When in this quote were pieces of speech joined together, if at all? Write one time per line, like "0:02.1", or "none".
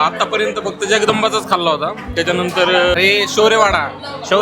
0:02.9